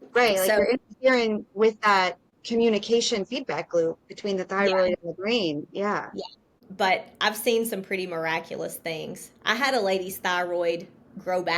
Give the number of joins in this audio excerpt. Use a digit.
1